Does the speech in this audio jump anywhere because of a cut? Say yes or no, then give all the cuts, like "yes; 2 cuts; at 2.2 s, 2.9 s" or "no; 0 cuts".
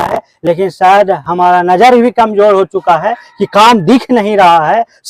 no; 0 cuts